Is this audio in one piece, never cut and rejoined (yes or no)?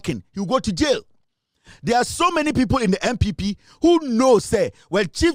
yes